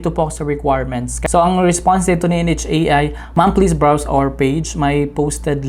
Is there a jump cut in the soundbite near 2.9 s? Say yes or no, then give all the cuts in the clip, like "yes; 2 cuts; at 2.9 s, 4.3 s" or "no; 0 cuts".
no; 1 cut; at 1.1 s